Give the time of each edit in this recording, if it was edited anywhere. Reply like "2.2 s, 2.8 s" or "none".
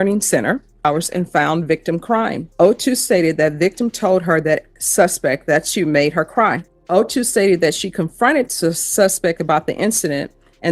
0.8 s, 2.4 s, 6.7 s